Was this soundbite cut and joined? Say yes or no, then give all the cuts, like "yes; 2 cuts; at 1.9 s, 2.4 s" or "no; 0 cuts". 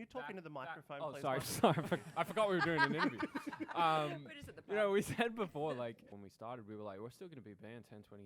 yes; 1 cut; at 6.1 s